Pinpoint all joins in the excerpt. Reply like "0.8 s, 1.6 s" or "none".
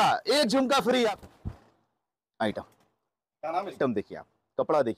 1.0 s, 3.8 s